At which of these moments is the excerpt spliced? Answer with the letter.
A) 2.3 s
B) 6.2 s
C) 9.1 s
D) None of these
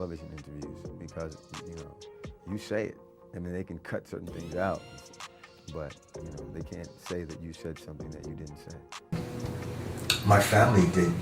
C